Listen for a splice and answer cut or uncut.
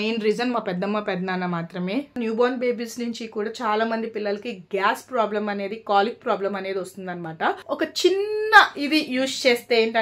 cut